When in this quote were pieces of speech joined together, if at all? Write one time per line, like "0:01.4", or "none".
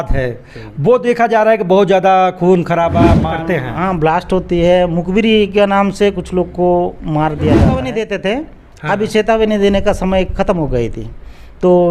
0:03.2
0:07.8